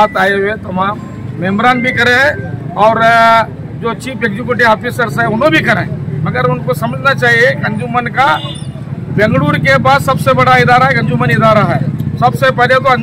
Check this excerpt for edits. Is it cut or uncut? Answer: uncut